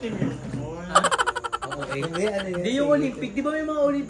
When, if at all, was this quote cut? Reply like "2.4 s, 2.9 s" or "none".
none